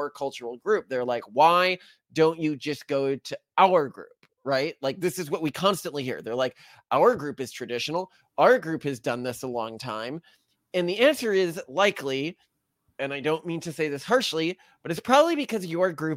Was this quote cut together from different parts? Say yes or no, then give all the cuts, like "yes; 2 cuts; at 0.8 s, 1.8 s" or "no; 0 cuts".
no; 0 cuts